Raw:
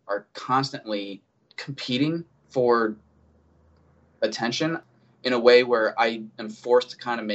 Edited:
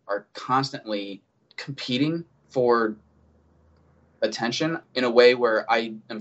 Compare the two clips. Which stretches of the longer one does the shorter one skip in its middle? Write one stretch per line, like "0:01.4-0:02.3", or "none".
0:04.8-0:05.1